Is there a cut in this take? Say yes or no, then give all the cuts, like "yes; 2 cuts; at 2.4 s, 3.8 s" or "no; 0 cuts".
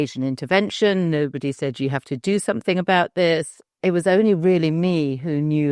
yes; 1 cut; at 3.6 s